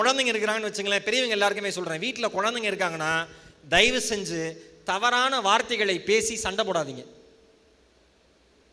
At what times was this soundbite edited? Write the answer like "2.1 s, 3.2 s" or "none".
none